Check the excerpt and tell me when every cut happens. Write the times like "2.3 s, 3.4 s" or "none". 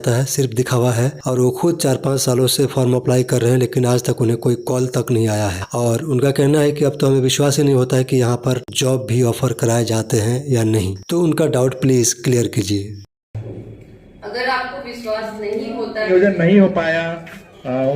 16.1 s

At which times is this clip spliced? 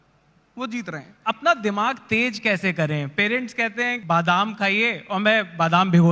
1.1 s, 4.0 s

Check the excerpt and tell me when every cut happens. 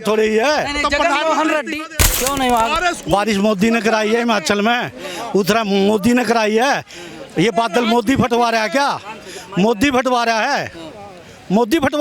1.8 s

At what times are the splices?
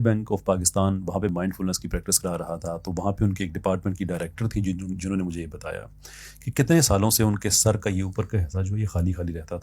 1.3 s

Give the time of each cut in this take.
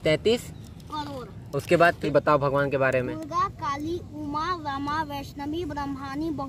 2.0 s

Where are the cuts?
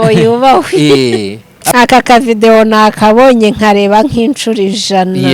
1.6 s

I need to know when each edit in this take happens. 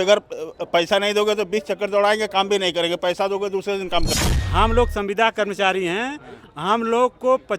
4.1 s

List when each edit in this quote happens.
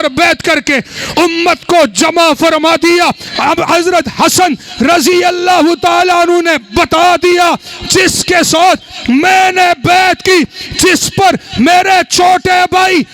3.3 s

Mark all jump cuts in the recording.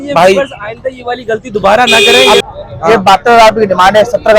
2.4 s

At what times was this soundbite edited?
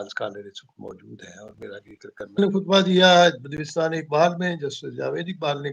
2.4 s

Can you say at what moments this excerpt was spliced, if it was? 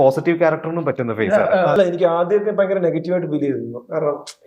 1.8 s

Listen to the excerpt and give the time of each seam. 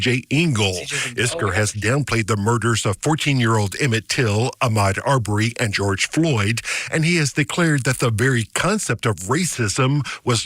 none

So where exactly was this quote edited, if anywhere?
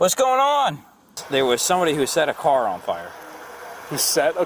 1.2 s

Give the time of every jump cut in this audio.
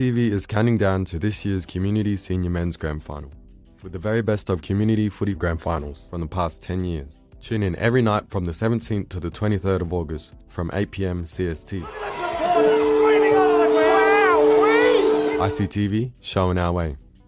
none

